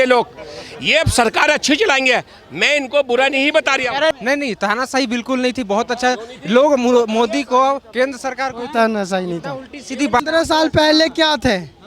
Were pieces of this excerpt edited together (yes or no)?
yes